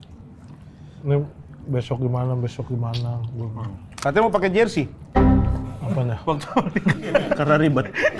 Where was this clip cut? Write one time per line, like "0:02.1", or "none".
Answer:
none